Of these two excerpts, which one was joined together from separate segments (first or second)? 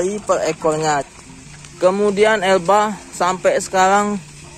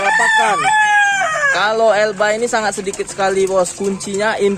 first